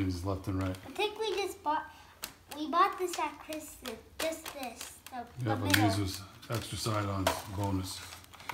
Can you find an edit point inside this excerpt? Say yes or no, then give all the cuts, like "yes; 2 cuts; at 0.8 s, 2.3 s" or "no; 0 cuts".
no; 0 cuts